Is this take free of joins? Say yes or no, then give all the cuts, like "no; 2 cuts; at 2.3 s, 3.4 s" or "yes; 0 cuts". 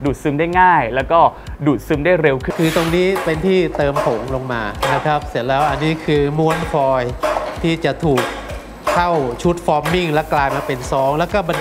no; 1 cut; at 2.5 s